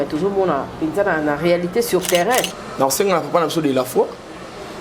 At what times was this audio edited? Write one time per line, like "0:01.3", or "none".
0:02.6